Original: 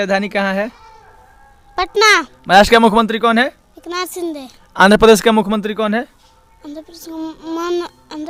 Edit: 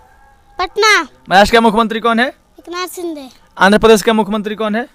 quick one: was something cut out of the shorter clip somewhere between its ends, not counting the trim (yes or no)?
no